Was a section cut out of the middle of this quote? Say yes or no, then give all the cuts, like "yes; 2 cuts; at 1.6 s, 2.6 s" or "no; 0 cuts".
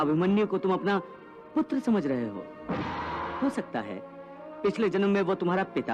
yes; 1 cut; at 3.3 s